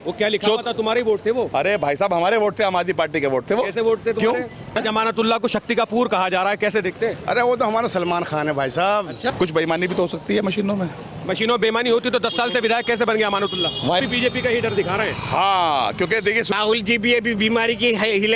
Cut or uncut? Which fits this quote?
cut